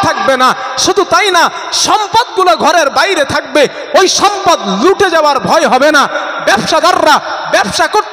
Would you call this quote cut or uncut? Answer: uncut